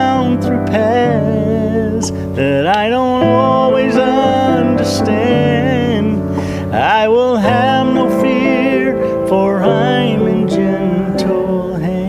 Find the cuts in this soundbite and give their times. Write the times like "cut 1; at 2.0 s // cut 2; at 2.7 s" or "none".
none